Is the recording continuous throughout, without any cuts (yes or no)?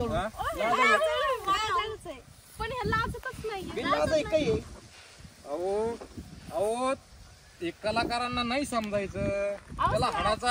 yes